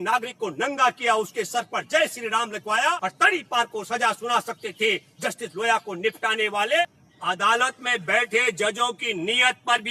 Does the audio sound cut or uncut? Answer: cut